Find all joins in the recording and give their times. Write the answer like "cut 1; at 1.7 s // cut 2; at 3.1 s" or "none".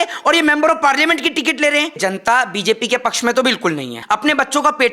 cut 1; at 2.0 s // cut 2; at 4.0 s